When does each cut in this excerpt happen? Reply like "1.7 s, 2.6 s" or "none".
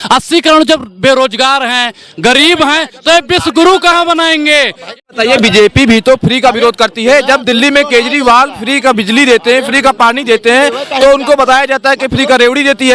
5.1 s